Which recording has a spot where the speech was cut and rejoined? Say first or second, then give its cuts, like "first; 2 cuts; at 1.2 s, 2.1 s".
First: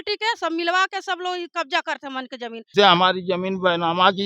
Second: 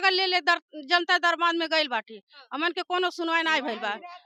first; 1 cut; at 2.7 s